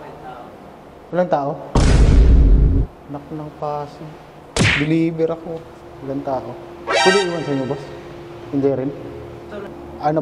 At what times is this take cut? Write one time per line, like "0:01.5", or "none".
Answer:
0:01.6
0:02.9

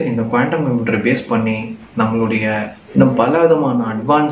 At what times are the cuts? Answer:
0:02.8

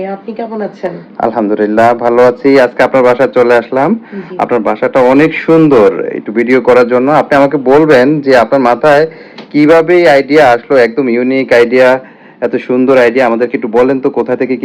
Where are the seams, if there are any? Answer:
none

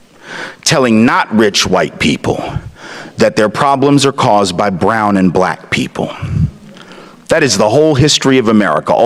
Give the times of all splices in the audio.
none

